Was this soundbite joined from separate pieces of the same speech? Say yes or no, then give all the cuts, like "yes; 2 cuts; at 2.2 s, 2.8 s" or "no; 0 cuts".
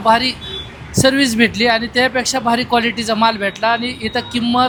no; 0 cuts